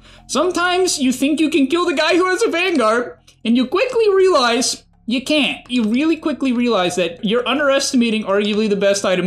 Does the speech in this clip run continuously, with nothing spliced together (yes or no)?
no